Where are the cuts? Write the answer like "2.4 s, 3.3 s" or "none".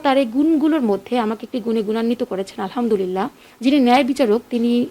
3.4 s